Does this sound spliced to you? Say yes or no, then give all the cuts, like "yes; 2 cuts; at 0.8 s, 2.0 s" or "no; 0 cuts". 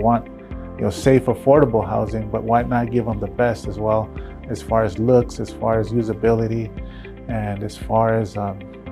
no; 0 cuts